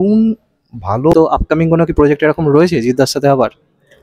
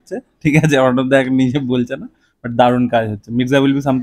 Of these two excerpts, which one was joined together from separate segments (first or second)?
first